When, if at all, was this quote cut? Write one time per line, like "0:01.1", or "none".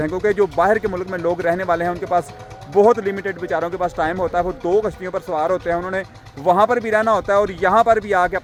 none